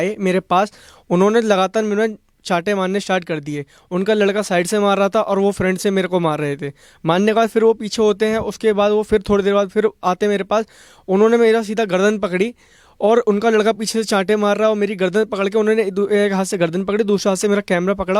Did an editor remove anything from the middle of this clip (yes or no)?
no